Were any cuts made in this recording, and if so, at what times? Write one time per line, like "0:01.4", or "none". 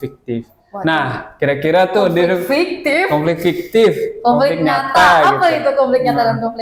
none